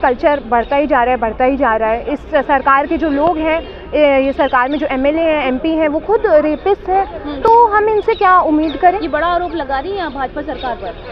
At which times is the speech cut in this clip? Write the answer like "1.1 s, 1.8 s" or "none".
none